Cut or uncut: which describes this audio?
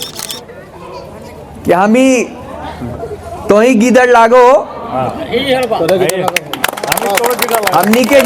uncut